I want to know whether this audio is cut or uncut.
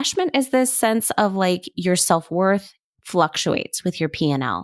uncut